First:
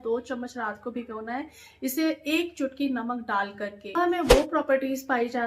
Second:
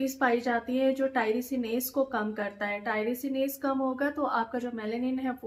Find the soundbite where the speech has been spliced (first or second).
first